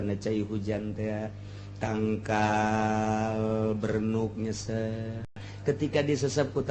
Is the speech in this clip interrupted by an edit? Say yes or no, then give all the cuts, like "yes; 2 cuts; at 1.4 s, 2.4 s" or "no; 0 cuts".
yes; 1 cut; at 5.5 s